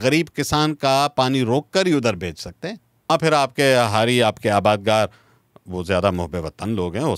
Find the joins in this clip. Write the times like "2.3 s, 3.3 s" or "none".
3.1 s